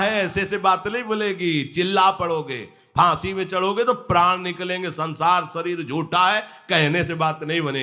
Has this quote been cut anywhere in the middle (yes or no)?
no